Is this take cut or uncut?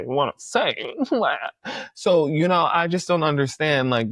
uncut